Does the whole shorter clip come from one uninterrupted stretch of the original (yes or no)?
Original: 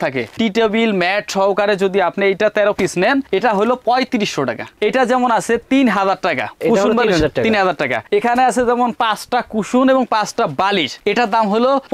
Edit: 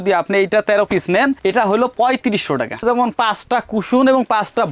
no